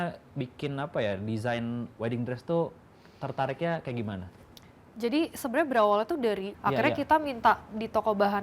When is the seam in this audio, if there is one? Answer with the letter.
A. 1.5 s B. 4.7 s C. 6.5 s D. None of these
C